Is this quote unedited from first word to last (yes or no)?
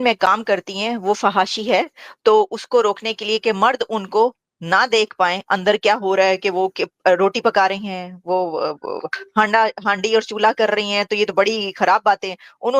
yes